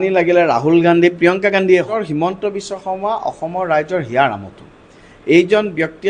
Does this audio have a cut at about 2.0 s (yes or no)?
yes